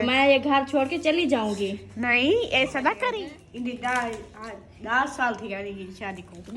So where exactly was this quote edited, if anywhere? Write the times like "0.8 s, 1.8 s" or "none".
3.1 s